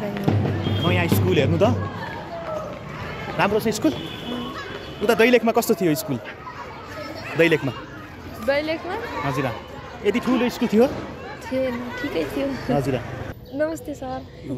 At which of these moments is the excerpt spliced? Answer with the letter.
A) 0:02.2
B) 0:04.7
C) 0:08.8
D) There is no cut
D